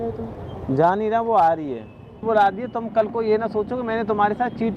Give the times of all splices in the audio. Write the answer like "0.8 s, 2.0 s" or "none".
2.2 s